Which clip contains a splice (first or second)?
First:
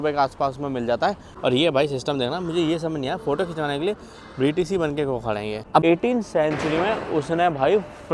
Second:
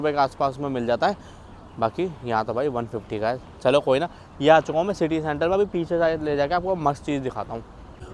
first